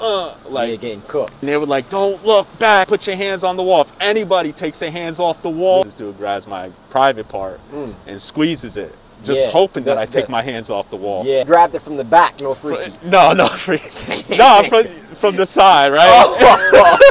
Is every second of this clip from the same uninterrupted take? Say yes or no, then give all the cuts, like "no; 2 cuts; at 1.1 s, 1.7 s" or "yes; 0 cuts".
no; 4 cuts; at 1.4 s, 2.9 s, 5.9 s, 11.4 s